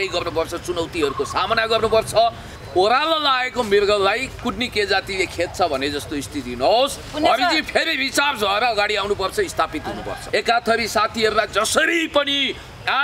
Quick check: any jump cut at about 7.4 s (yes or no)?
no